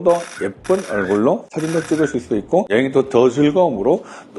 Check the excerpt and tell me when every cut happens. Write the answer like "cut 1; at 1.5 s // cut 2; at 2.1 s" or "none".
cut 1; at 2.7 s